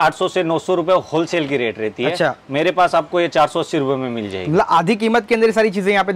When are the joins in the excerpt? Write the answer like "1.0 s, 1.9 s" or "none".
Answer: none